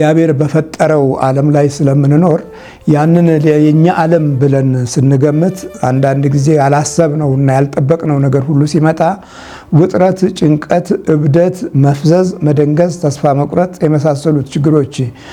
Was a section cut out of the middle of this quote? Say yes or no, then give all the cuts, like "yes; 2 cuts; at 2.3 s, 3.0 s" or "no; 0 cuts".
no; 0 cuts